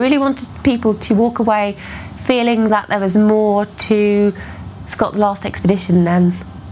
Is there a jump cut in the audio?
no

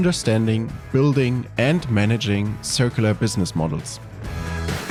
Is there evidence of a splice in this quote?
no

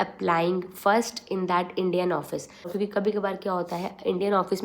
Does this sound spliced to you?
yes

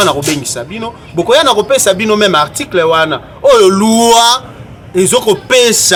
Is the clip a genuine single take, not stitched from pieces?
yes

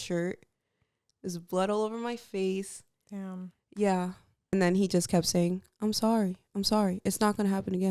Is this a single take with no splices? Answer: no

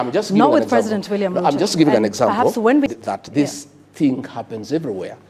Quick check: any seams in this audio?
yes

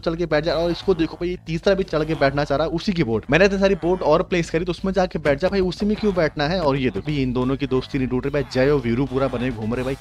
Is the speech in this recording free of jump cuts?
no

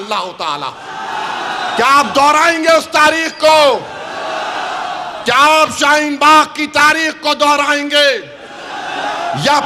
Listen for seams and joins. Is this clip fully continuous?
yes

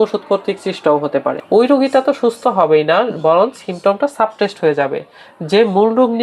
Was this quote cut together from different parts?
yes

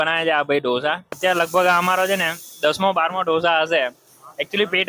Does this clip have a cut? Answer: yes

